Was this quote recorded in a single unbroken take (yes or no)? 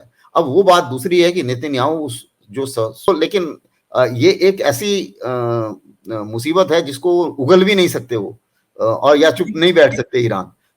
no